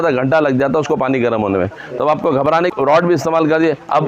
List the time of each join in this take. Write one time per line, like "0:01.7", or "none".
0:02.7